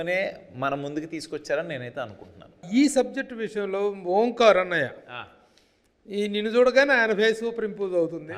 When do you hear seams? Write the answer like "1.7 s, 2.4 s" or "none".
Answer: 2.6 s